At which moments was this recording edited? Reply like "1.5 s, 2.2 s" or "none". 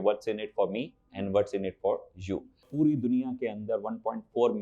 2.7 s